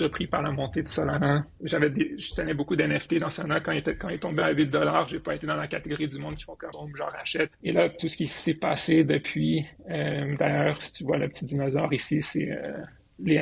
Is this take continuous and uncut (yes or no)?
no